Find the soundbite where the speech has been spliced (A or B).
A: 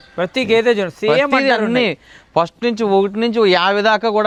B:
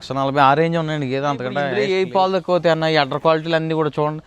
B